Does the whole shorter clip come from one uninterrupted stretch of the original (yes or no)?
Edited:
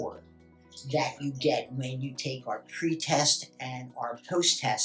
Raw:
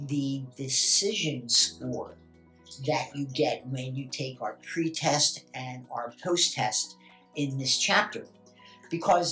yes